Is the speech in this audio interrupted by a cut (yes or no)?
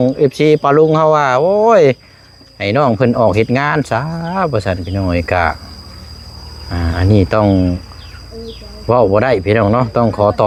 no